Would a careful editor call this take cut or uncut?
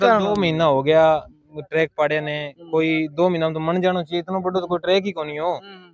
uncut